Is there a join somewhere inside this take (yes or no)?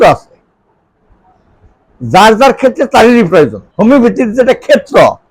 yes